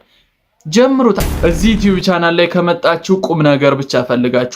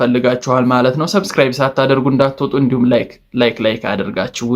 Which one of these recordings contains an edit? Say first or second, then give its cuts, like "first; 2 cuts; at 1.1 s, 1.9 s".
first; 1 cut; at 1.2 s